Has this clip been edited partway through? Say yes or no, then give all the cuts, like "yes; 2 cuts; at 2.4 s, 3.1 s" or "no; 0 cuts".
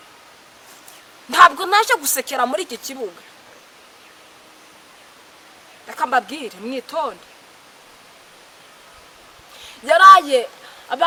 no; 0 cuts